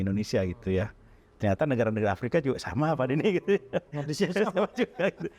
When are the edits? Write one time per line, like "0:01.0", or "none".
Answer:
0:01.2